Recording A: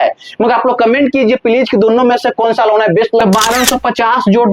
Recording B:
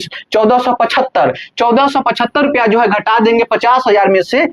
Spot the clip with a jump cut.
A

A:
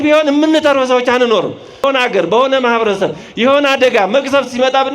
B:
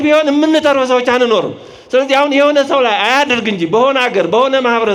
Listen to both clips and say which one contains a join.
A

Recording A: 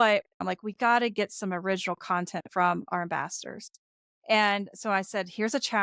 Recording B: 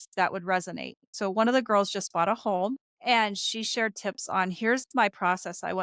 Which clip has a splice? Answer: B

